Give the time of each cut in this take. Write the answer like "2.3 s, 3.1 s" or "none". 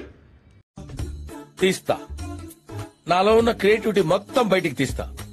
none